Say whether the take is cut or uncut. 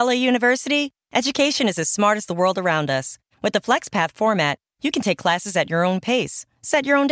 uncut